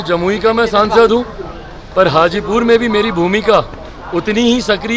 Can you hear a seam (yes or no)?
no